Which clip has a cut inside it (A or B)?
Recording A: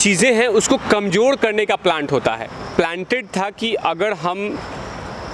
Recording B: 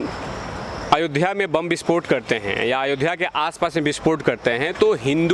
A